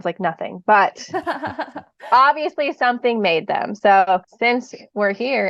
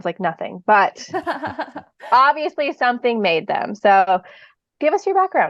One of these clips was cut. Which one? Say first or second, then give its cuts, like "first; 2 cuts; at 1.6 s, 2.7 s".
first; 1 cut; at 4.3 s